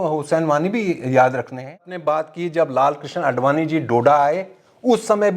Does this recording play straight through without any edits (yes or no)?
no